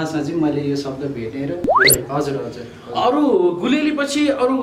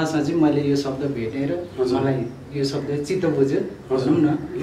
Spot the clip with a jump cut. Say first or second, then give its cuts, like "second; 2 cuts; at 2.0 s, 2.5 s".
first; 1 cut; at 1.9 s